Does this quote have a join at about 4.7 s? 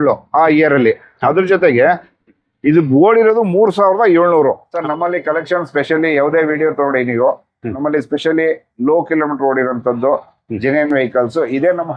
yes; 1 cut; at 4.7 s

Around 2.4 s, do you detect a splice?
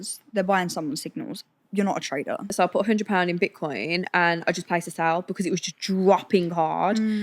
yes; 1 cut; at 2.4 s

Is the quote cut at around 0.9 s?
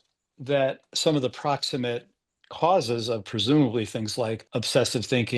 yes; 2 cuts; at 0.9 s, 4.4 s

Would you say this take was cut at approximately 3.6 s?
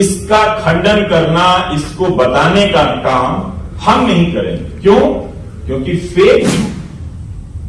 no; 1 cut; at 6.5 s

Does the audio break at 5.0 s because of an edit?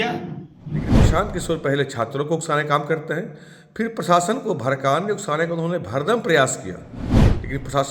no; 1 cut; at 1.0 s

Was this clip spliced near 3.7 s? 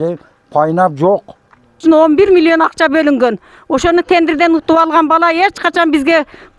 no; 1 cut; at 1.8 s

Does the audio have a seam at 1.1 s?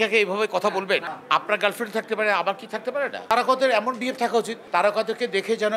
yes; 3 cuts; at 1.1 s, 3.2 s, 4.6 s

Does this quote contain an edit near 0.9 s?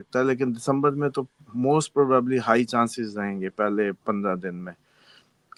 no; 0 cuts

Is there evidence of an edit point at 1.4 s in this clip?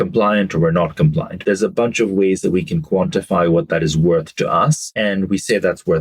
yes; 2 cuts; at 1.4 s, 4.8 s

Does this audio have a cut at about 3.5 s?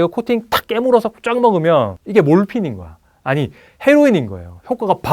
no; 1 cut; at 2.0 s

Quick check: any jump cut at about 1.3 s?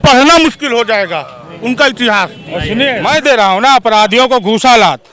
no; 1 cut; at 3.0 s

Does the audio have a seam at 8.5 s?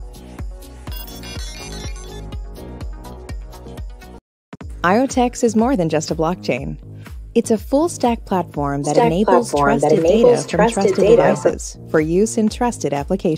no; 1 cut; at 4.2 s

